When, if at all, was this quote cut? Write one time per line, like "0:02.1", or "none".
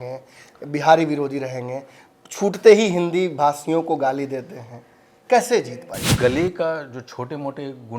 0:06.0